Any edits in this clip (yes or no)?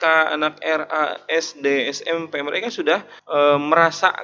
yes